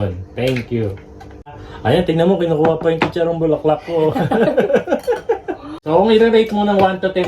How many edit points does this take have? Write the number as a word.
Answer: two